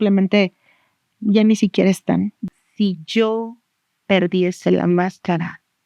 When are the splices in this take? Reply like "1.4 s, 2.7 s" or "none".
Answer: 2.4 s